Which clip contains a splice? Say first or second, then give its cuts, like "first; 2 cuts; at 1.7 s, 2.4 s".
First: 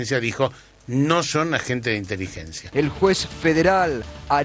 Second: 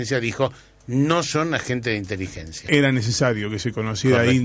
second; 1 cut; at 2.5 s